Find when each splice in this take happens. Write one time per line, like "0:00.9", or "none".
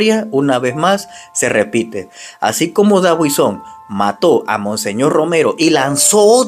none